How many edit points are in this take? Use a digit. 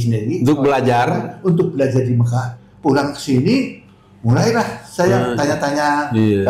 1